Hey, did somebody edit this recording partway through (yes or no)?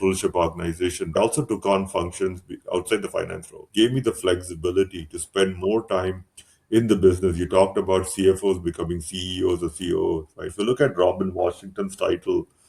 yes